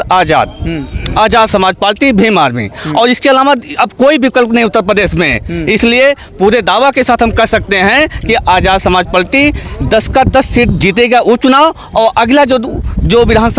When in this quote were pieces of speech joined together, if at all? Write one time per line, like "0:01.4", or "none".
none